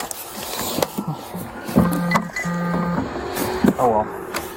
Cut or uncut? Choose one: uncut